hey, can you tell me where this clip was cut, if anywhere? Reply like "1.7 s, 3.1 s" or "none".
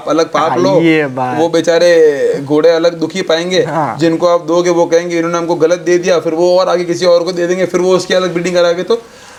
none